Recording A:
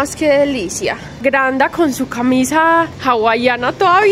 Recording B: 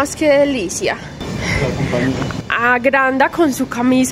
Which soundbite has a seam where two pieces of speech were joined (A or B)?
A